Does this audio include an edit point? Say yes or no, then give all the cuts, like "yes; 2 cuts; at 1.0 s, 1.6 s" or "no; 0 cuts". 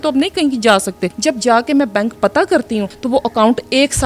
yes; 2 cuts; at 1.1 s, 2.9 s